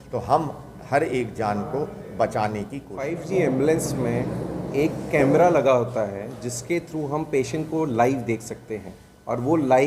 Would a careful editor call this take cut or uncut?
cut